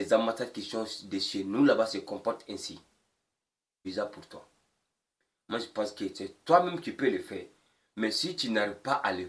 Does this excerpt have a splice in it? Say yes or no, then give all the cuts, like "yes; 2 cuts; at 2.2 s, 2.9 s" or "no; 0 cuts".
yes; 1 cut; at 3.8 s